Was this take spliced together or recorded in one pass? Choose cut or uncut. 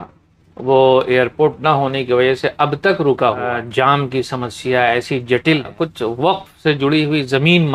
cut